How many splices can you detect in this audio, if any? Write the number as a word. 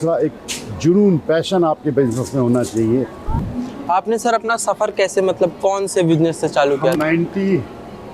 two